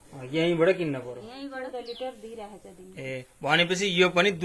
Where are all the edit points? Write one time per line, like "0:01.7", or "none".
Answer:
0:01.3